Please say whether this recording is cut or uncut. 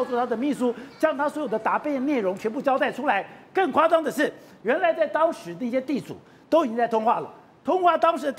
cut